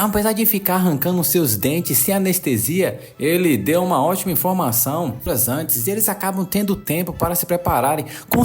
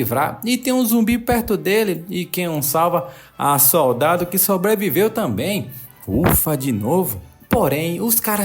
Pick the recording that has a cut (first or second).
first